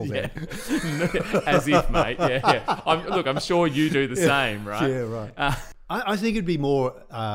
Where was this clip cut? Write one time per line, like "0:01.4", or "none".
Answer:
0:05.7